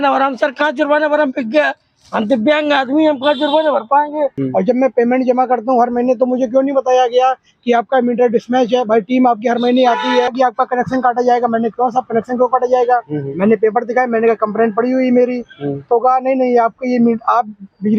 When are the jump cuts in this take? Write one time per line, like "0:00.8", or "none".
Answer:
0:04.4
0:10.3